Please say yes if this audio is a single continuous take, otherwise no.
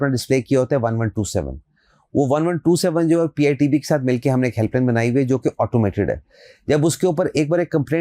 yes